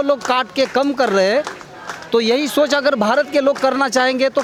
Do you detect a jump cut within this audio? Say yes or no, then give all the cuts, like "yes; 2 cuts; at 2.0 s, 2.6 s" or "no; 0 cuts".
no; 0 cuts